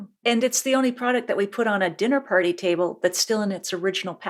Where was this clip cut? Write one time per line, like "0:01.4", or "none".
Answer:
none